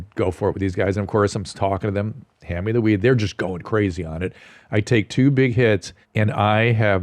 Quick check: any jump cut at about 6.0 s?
yes; 1 cut; at 6.0 s

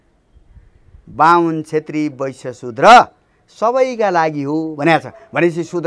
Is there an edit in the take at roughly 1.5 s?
no; 0 cuts

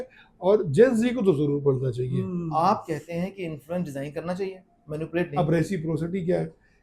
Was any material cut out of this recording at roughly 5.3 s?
yes; 2 cuts; at 2.1 s, 5.3 s

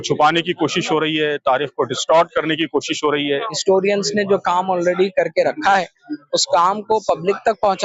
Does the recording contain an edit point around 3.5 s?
yes; 1 cut; at 3.5 s

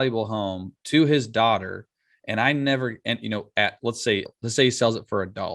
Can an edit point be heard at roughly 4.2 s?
yes; 1 cut; at 4.2 s

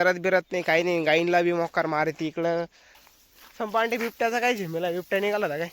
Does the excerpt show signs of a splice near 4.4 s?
no; 1 cut; at 3.0 s

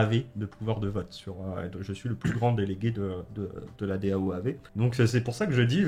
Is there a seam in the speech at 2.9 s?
no; 1 cut; at 4.7 s

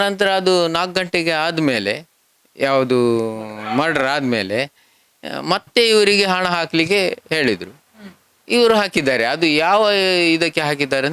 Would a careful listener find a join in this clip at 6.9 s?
no; 0 cuts

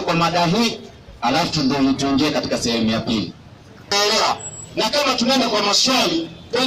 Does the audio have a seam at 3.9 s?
yes; 1 cut; at 3.9 s

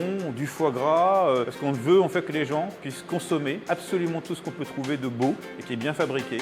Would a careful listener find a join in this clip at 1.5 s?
yes; 2 cuts; at 1.5 s, 3.6 s

